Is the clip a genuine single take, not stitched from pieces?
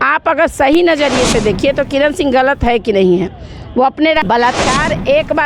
no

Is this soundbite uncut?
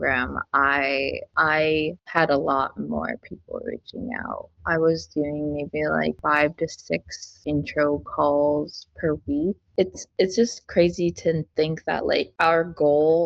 no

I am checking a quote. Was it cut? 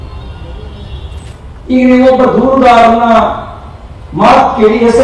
yes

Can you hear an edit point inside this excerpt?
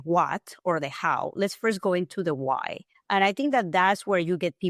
no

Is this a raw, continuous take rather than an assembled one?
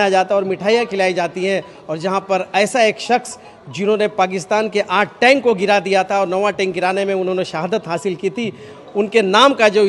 yes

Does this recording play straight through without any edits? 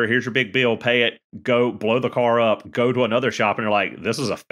no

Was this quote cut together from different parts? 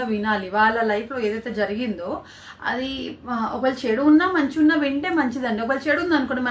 no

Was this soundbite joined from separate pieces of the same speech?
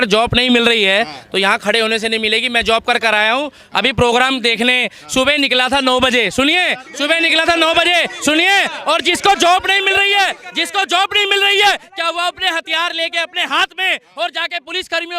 no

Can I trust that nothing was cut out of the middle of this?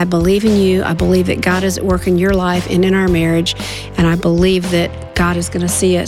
no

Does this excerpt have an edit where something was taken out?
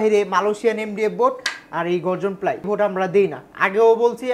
yes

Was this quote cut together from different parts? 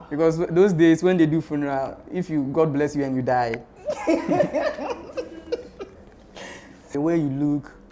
yes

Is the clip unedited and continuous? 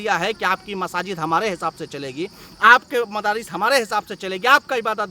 yes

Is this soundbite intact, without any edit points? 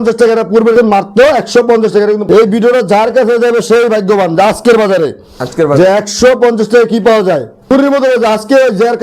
no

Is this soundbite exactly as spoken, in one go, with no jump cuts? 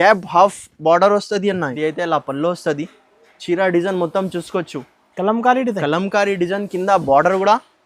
no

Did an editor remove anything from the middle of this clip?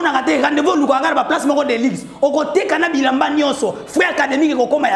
no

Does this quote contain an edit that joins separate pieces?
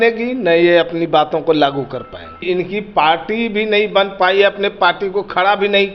yes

